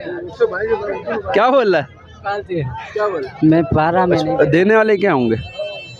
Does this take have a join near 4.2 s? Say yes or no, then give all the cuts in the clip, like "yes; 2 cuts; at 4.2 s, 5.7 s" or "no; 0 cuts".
yes; 1 cut; at 4.2 s